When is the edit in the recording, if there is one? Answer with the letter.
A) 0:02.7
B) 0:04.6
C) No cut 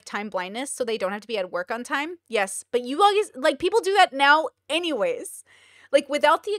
C